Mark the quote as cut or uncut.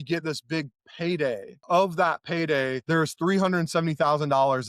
cut